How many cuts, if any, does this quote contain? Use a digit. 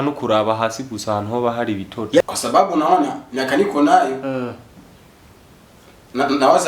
1